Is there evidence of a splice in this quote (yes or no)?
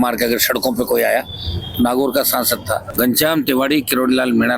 yes